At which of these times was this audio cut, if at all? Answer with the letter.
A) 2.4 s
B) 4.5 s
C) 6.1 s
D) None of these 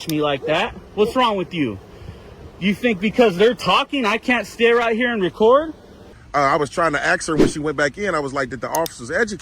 C